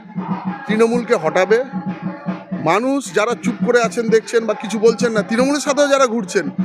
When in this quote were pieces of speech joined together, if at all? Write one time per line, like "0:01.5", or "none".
none